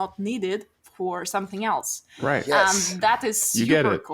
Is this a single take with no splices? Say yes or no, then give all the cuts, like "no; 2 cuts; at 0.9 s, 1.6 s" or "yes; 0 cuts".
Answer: yes; 0 cuts